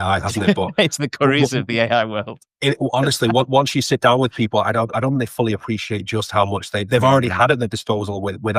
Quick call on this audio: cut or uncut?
uncut